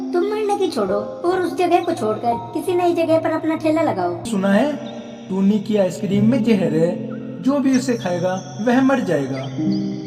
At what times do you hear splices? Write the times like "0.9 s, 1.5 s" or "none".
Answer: 4.3 s

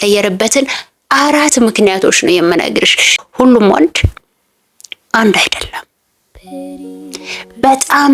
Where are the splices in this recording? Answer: 3.2 s

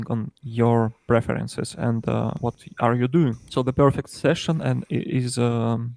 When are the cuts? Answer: 2.4 s, 3.5 s

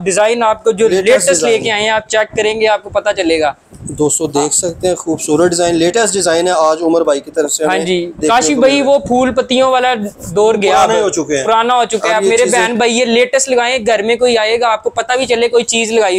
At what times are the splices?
none

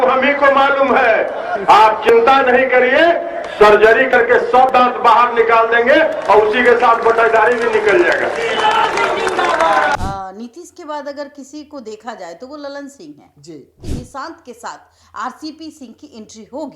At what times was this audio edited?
10.0 s, 13.8 s

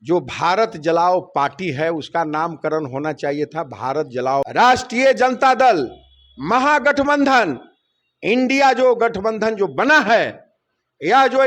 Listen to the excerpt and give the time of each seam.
4.5 s

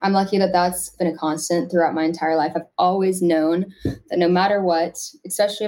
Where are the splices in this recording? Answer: 0.9 s

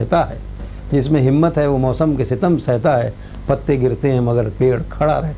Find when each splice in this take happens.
none

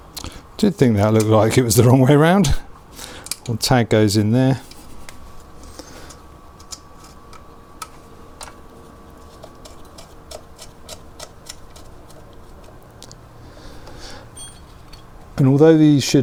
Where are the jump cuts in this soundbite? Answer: none

